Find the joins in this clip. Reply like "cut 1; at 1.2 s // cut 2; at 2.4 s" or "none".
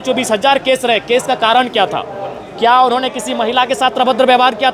none

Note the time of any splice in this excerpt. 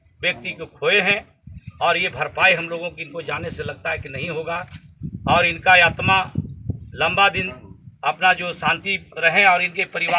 none

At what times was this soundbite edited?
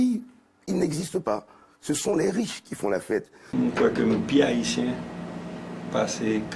cut 1; at 3.4 s

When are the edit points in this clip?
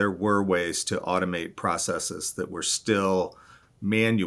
none

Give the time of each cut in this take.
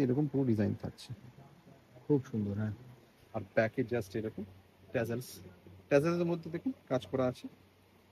none

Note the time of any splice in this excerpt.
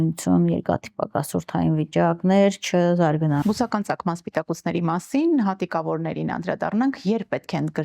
cut 1; at 3.4 s

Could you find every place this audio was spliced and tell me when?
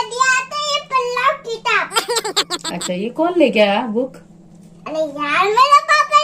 none

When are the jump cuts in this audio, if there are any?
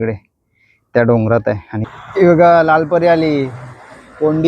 cut 1; at 1.7 s

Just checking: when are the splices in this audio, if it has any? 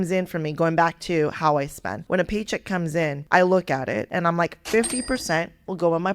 cut 1; at 1.9 s // cut 2; at 3.2 s // cut 3; at 4.1 s

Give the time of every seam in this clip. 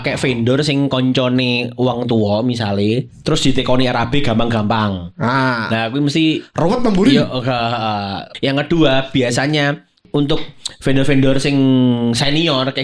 cut 1; at 8.2 s // cut 2; at 10.0 s

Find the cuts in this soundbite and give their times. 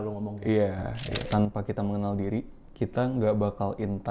cut 1; at 1.3 s // cut 2; at 2.6 s

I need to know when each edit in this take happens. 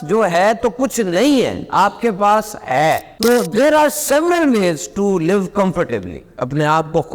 cut 1; at 3.1 s

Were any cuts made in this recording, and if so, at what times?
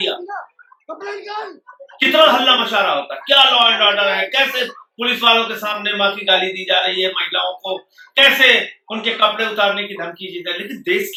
none

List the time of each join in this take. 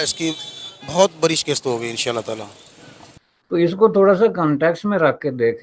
cut 1; at 3.3 s

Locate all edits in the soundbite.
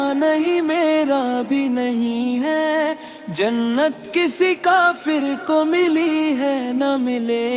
none

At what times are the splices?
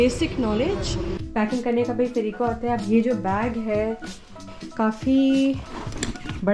cut 1; at 1.1 s // cut 2; at 4.5 s

